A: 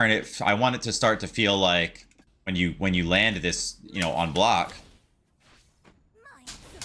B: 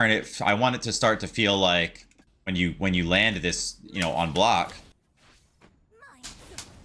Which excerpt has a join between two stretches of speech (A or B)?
B